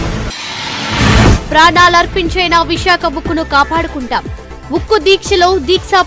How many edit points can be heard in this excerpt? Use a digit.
0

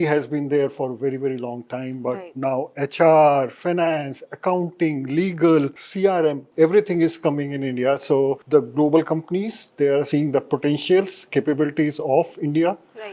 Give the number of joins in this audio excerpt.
0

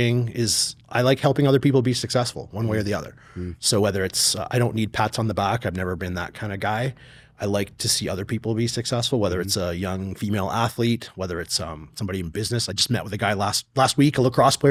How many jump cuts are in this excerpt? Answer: 0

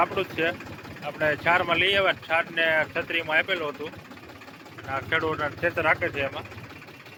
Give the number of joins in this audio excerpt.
0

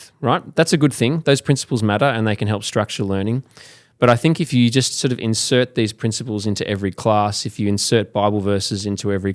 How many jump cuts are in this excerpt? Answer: 1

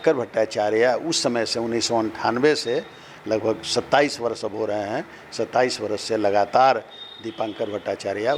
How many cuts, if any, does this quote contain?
0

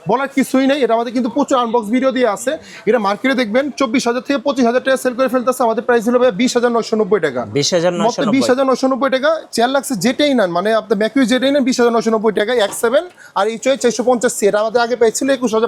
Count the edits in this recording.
0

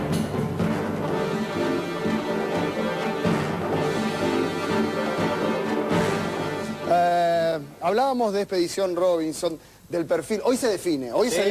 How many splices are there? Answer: 1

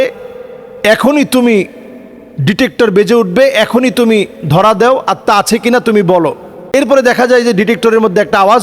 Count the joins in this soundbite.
1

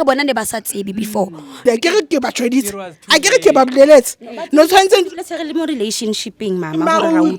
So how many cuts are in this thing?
1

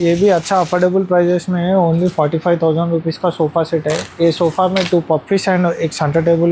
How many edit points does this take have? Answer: 0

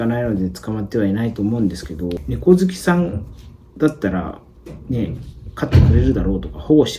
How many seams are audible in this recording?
1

